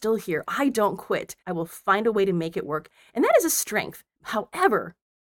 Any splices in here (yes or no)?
yes